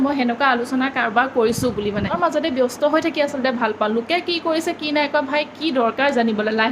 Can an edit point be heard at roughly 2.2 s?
yes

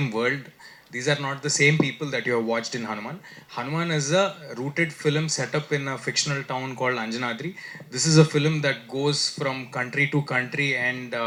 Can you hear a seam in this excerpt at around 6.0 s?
no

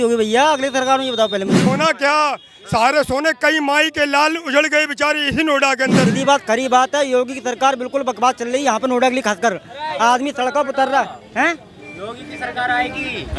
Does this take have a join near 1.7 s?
yes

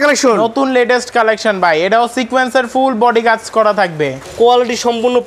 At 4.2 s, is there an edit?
yes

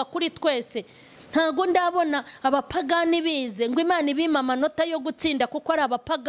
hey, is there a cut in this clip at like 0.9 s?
no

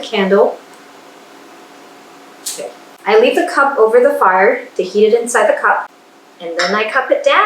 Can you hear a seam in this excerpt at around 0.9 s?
no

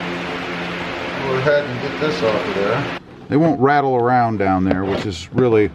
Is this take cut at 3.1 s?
yes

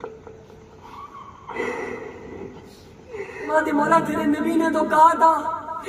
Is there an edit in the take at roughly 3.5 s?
yes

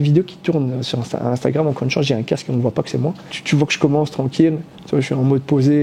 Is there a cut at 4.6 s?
no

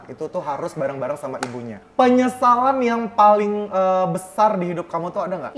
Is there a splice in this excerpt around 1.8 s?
yes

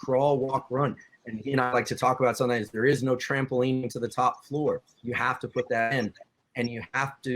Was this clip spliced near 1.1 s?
yes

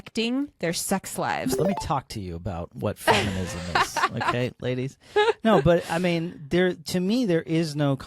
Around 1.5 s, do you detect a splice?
yes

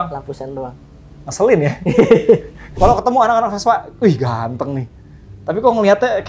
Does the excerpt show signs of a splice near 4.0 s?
no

